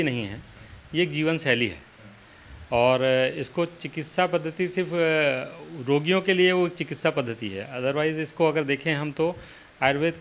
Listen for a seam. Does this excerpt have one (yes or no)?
no